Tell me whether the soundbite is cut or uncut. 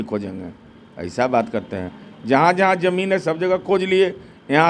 uncut